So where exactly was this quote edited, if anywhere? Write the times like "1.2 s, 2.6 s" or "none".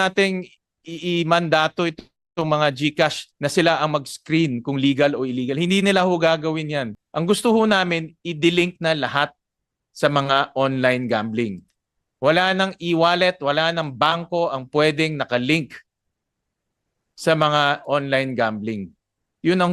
6.9 s